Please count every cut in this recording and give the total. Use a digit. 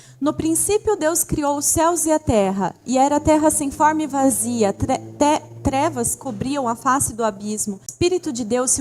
1